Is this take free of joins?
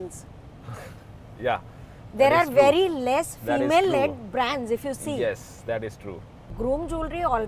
no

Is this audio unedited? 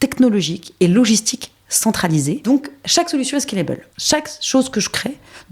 no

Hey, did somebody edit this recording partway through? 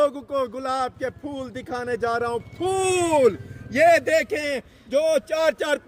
no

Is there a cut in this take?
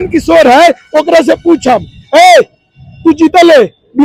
no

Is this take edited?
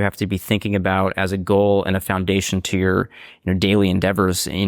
no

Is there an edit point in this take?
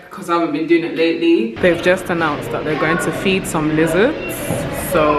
yes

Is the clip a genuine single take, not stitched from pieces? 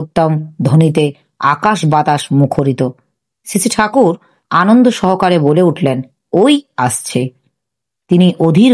yes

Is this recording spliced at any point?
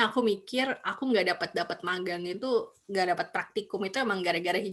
no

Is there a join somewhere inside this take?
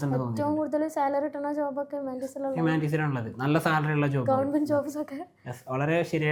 no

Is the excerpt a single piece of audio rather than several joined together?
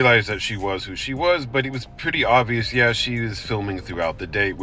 yes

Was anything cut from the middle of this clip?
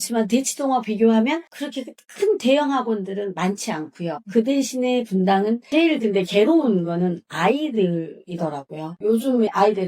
yes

